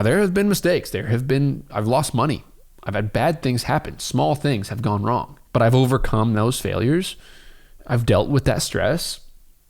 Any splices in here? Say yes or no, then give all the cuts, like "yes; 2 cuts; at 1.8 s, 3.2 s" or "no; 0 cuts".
no; 0 cuts